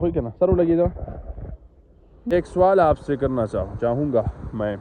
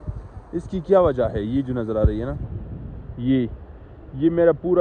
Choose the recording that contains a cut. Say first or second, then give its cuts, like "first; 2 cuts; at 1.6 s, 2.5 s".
first; 1 cut; at 2.3 s